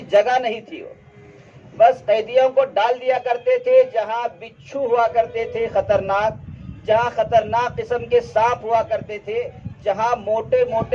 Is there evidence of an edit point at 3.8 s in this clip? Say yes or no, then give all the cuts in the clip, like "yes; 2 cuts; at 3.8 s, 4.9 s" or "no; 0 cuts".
no; 0 cuts